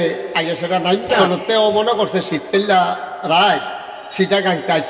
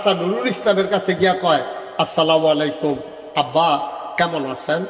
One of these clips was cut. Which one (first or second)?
first